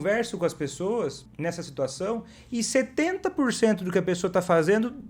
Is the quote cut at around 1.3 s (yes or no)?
yes